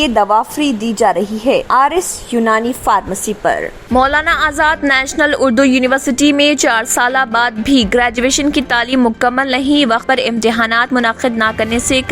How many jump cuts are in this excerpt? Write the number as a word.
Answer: one